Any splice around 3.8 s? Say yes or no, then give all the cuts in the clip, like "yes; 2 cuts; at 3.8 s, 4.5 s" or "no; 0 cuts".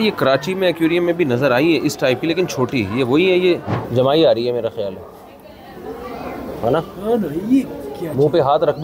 yes; 1 cut; at 3.8 s